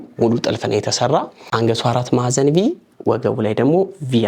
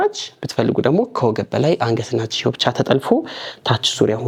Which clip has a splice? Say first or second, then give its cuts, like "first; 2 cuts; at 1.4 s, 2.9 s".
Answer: first; 1 cut; at 1.4 s